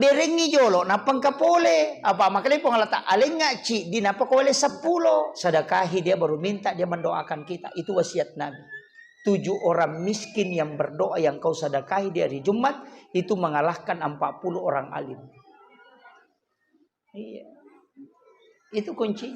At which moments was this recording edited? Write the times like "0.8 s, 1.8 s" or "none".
5.3 s